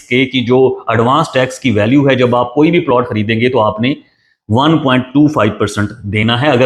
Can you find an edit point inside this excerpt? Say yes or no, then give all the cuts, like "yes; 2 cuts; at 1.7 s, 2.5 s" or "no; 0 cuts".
no; 0 cuts